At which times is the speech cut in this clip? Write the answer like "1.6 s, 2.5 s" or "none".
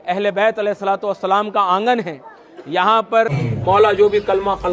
3.4 s